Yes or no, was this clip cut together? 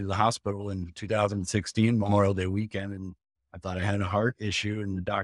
no